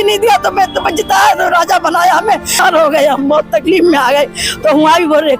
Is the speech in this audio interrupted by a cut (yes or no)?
yes